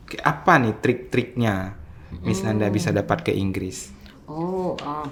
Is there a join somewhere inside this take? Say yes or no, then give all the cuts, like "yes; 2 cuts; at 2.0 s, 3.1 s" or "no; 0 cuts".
no; 0 cuts